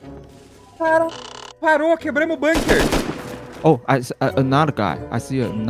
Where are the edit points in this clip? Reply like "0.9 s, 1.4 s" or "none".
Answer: 3.6 s